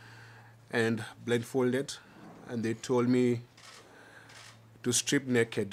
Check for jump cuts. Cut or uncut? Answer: uncut